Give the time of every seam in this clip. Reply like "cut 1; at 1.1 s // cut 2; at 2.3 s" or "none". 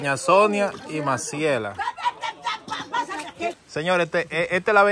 cut 1; at 3.6 s